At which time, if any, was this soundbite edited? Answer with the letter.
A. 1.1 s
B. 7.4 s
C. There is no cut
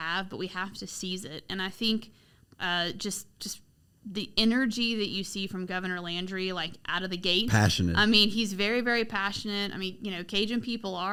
C